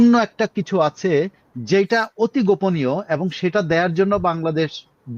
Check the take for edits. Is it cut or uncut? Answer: uncut